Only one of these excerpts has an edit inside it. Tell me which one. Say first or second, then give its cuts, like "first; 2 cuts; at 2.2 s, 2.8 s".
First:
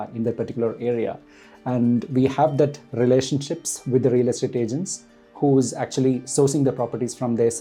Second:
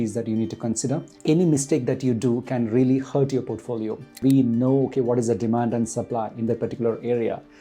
second; 2 cuts; at 1.1 s, 4.2 s